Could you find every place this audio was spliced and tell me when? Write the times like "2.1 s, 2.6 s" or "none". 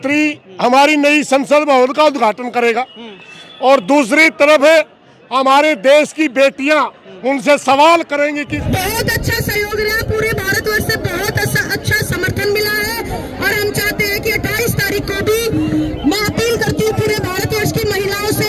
8.6 s